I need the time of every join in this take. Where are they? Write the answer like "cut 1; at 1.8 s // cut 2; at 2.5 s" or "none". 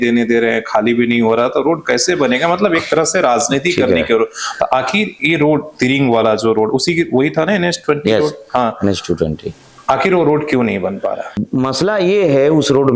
cut 1; at 9.7 s // cut 2; at 11.4 s